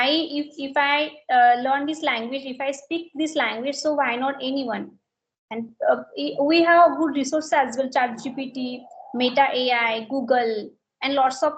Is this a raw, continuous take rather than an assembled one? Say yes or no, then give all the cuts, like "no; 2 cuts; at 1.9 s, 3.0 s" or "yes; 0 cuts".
yes; 0 cuts